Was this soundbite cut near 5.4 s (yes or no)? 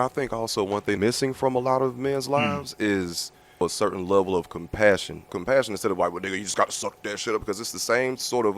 yes